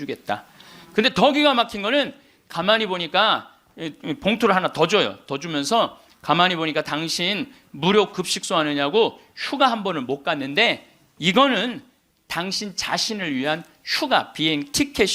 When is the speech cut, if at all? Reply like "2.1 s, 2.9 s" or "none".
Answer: none